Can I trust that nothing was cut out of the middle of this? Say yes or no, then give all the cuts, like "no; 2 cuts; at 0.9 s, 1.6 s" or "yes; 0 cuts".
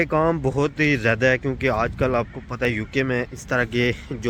yes; 0 cuts